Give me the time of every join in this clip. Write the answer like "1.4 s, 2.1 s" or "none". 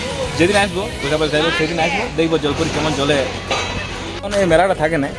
none